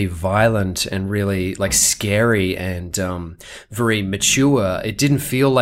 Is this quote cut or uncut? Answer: uncut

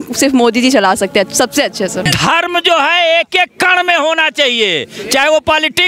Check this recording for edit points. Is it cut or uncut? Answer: cut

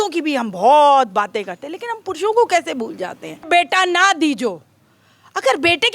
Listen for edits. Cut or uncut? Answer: cut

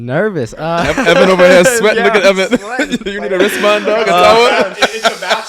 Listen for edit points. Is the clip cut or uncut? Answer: uncut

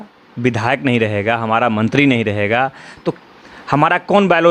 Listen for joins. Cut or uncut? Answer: uncut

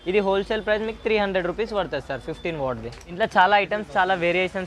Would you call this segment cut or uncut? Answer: cut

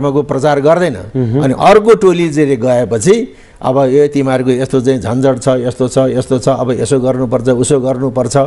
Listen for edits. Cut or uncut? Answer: cut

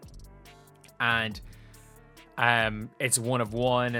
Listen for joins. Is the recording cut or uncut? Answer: uncut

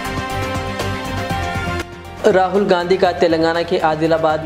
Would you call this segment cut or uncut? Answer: cut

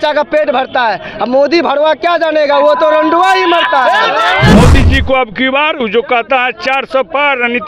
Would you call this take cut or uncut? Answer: cut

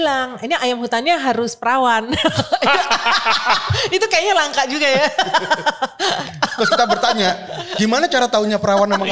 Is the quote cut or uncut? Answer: uncut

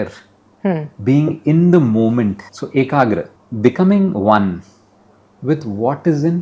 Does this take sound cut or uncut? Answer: cut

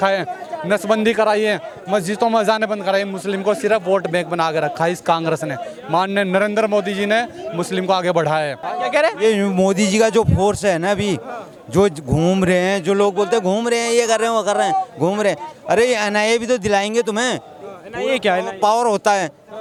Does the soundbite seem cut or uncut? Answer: uncut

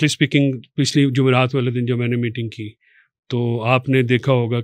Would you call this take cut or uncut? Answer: uncut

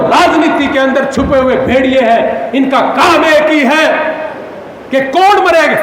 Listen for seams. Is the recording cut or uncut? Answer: uncut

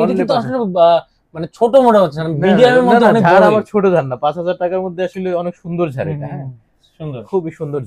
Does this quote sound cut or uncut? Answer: uncut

